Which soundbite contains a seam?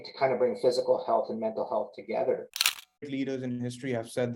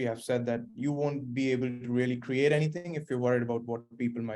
first; 1 cut; at 2.9 s

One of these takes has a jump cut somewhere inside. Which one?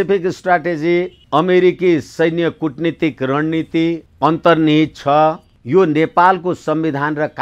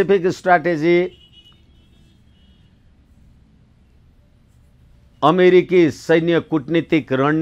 first; 3 cuts; at 1.2 s, 4.1 s, 5.5 s

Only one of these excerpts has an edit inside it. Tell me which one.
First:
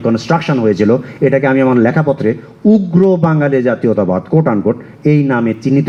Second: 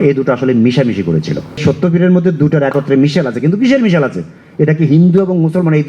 second; 1 cut; at 1.6 s

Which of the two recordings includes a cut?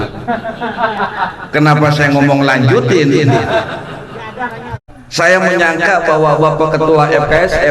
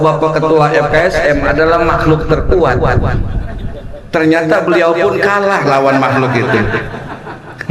first; 1 cut; at 5.0 s

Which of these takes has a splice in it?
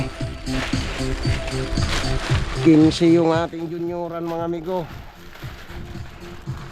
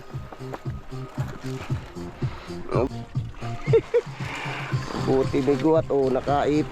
second; 1 cut; at 2.9 s

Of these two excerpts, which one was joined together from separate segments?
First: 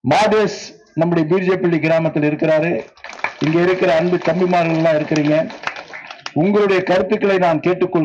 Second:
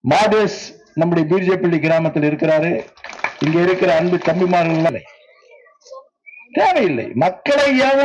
second; 1 cut; at 4.9 s

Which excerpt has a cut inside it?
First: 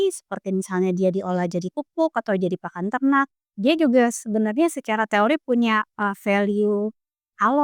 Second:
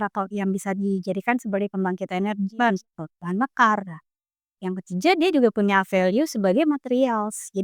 first; 1 cut; at 3.4 s

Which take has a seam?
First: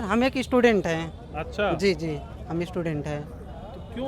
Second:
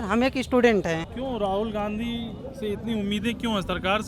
second; 1 cut; at 1.1 s

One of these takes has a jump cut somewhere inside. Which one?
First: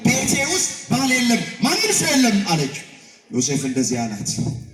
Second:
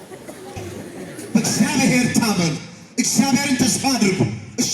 second; 1 cut; at 1.0 s

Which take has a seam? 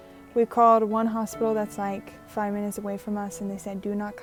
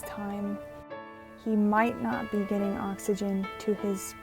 second; 1 cut; at 1.0 s

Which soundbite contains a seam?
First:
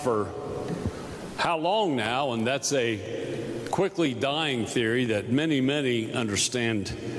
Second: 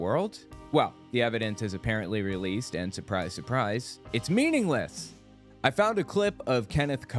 second; 1 cut; at 5.3 s

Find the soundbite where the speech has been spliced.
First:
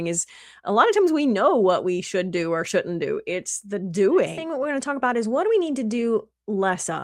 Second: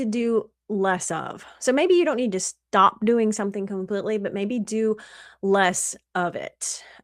first; 1 cut; at 4.5 s

